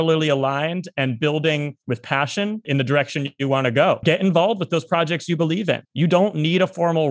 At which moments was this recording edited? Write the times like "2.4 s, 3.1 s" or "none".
2.6 s, 4.0 s, 5.9 s